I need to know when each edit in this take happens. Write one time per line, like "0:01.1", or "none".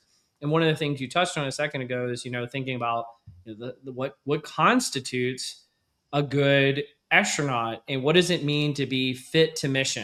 none